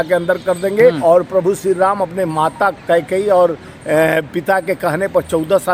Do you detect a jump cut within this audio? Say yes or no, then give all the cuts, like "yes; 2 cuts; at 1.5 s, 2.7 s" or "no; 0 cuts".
yes; 1 cut; at 1.0 s